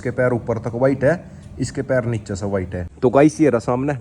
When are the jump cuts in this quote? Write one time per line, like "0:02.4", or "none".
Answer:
0:02.9

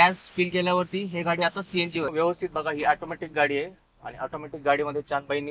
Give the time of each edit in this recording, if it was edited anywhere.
0:02.1

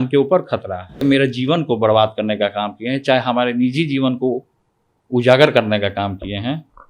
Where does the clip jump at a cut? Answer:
0:01.0

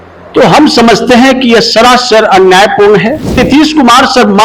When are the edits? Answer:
0:03.4

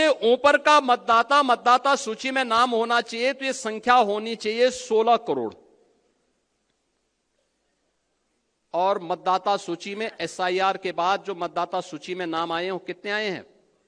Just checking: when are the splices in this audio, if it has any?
none

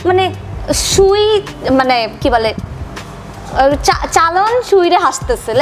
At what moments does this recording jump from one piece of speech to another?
none

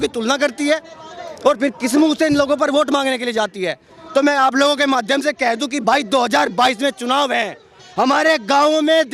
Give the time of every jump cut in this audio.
none

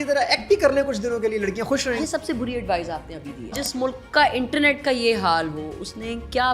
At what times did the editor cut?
0:01.9
0:03.6

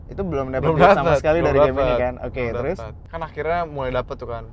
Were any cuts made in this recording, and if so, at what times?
0:03.1

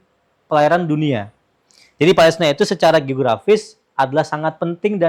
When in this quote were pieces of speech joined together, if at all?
none

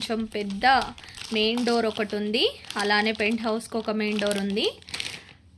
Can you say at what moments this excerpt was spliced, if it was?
none

